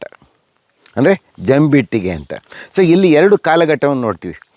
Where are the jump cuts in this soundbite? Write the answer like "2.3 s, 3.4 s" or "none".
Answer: none